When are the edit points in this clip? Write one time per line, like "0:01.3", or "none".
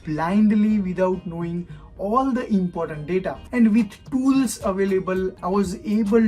0:03.5
0:05.3

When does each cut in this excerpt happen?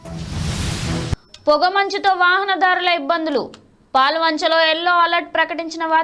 0:01.2

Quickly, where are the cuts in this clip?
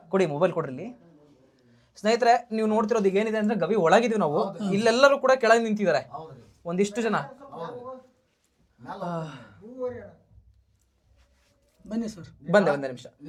none

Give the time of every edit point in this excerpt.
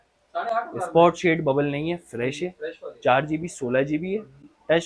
none

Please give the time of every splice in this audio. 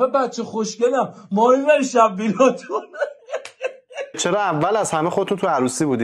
0:04.2

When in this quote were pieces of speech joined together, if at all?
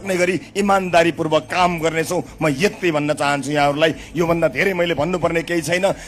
none

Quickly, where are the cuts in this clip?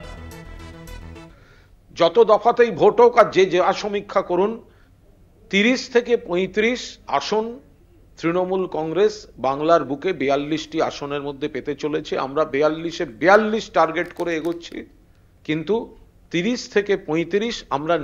0:01.4

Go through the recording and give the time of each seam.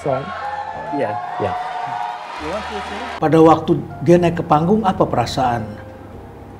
0:03.2

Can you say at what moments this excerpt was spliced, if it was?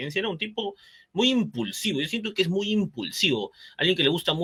none

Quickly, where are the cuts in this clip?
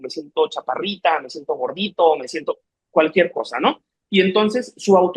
none

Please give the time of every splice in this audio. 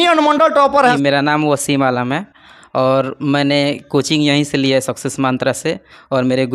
0:01.0

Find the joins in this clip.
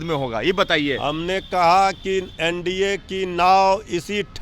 none

